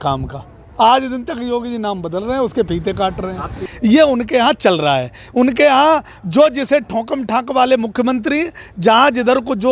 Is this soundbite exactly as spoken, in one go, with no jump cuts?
no; 1 cut; at 3.6 s

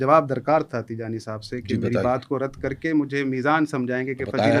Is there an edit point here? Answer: no; 0 cuts

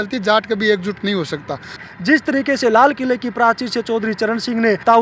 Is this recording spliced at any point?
yes; 1 cut; at 1.8 s

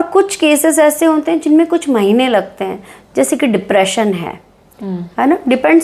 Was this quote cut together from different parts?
no; 0 cuts

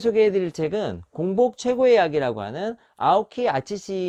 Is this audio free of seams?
yes; 0 cuts

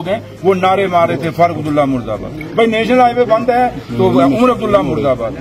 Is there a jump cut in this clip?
no; 0 cuts

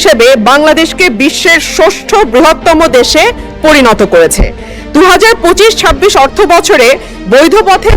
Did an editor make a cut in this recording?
no; 0 cuts

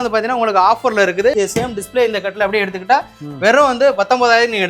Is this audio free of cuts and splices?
no; 1 cut; at 1.4 s

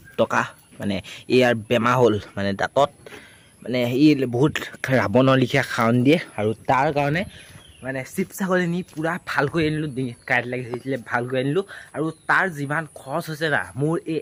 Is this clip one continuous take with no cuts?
yes; 0 cuts

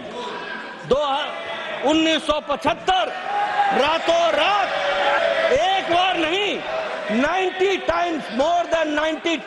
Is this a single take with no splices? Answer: no; 1 cut; at 5.2 s

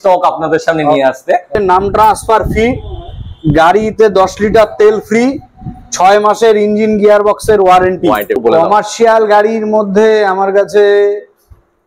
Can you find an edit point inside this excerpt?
yes; 2 cuts; at 1.6 s, 8.4 s

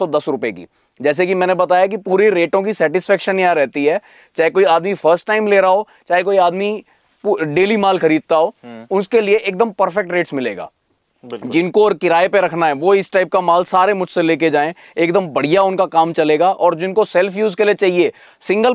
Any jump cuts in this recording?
no; 0 cuts

